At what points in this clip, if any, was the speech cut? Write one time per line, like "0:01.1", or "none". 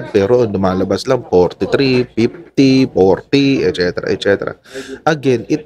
none